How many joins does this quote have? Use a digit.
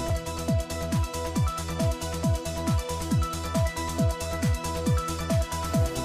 0